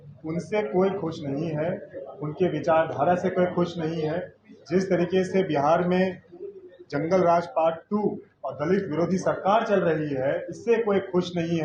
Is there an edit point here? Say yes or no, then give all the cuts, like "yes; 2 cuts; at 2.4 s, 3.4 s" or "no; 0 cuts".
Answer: no; 0 cuts